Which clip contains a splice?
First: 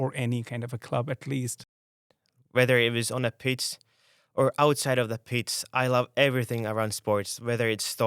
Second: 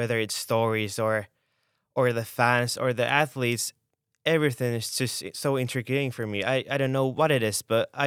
first; 1 cut; at 2.0 s

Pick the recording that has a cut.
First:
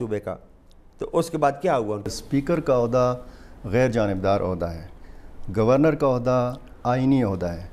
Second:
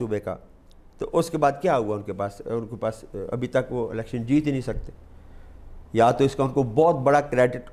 first; 1 cut; at 2.1 s

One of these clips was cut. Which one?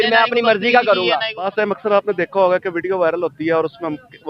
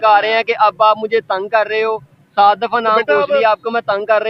first; 1 cut; at 1.5 s

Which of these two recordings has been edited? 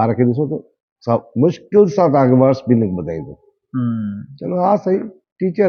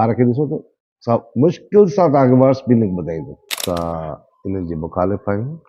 second; 1 cut; at 3.5 s

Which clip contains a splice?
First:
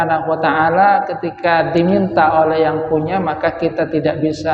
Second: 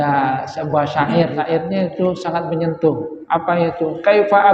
second; 1 cut; at 1.3 s

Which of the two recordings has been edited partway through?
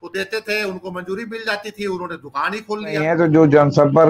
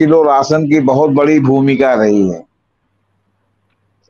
first; 1 cut; at 3.1 s

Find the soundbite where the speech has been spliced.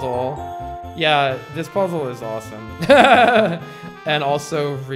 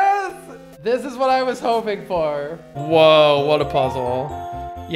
second; 1 cut; at 2.7 s

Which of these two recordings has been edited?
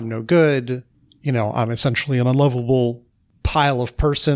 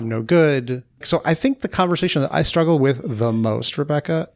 second; 1 cut; at 1.1 s

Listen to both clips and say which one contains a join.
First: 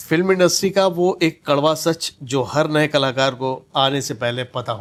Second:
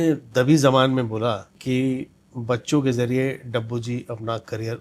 second; 1 cut; at 1.5 s

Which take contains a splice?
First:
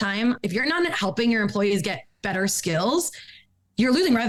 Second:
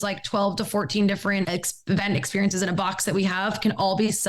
second; 1 cut; at 1.5 s

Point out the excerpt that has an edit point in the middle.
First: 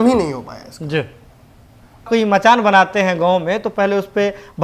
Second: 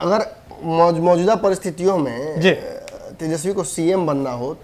first; 1 cut; at 2.0 s

